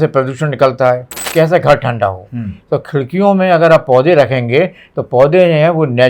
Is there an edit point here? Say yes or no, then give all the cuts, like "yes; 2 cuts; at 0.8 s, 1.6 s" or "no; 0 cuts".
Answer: yes; 1 cut; at 1.3 s